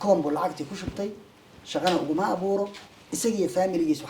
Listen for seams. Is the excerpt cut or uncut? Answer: uncut